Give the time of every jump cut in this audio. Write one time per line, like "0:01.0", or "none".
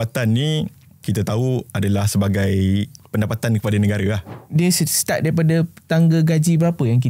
0:01.0
0:03.0
0:04.3

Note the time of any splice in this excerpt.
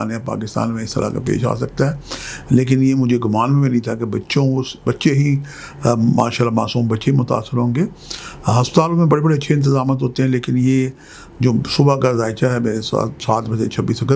none

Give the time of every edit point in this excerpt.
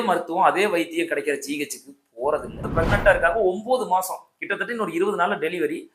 0:02.7

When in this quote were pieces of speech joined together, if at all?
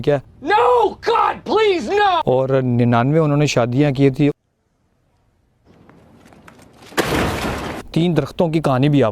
0:02.2
0:07.8

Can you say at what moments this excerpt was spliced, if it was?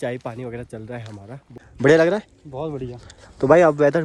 0:01.6

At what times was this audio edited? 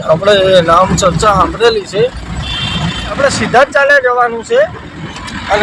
0:03.0

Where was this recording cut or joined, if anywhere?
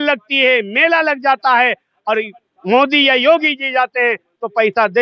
none

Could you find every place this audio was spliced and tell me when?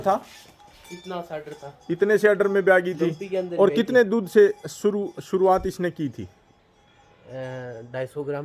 none

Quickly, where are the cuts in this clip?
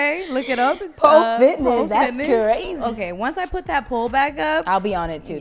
0:02.7

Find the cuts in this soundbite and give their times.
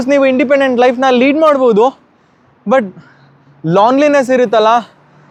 none

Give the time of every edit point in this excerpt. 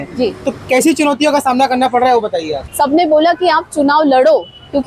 0:02.6

